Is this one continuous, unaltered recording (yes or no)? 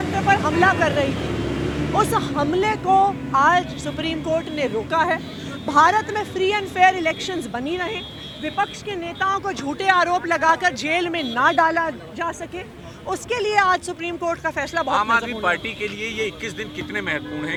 yes